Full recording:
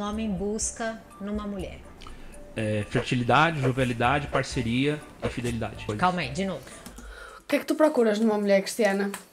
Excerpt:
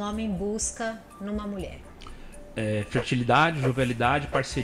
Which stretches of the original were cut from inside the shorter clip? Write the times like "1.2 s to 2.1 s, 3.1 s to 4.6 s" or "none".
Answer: none